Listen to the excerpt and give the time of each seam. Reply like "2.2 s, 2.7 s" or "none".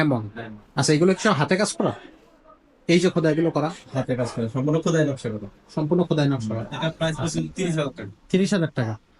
6.7 s